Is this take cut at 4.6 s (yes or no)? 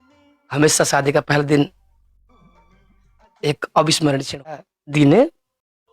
yes